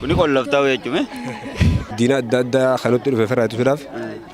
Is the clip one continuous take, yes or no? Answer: no